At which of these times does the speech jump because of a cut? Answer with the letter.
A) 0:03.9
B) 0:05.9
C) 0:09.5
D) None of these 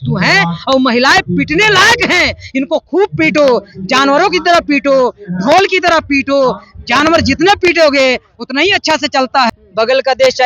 C